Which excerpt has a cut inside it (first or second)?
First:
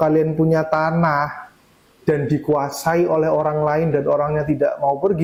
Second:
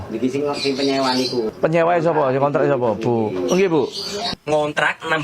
second